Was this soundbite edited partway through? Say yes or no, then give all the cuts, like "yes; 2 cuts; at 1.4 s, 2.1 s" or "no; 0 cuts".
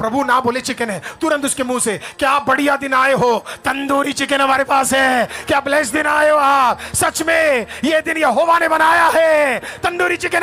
no; 0 cuts